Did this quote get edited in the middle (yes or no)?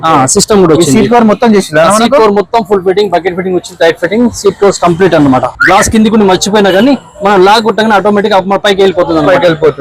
yes